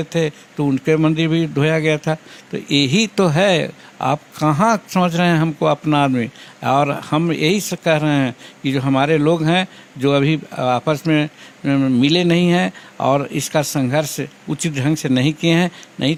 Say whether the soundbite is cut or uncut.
uncut